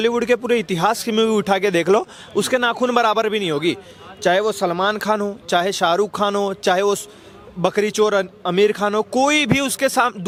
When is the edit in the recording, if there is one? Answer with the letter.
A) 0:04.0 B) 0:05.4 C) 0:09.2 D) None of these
D